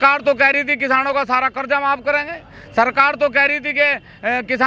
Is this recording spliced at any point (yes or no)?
no